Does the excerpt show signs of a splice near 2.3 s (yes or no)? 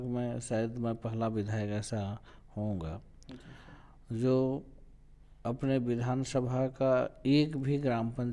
no